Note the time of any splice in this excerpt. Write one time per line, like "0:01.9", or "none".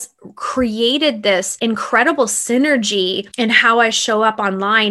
0:01.5
0:03.2